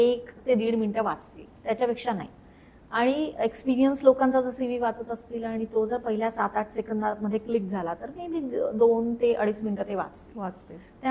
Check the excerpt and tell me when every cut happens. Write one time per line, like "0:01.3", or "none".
none